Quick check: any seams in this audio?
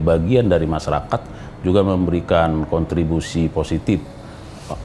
no; 0 cuts

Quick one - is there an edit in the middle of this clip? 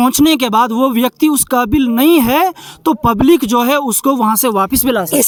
no; 0 cuts

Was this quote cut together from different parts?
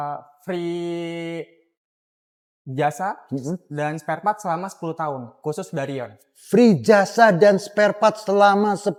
no; 0 cuts

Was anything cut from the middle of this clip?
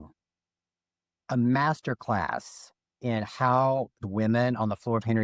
yes; 1 cut; at 4.0 s

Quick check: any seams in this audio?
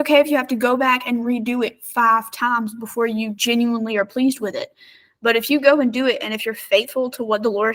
no; 0 cuts

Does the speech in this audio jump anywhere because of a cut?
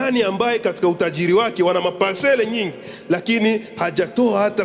no; 0 cuts

